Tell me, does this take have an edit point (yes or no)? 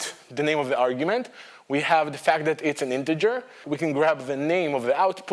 yes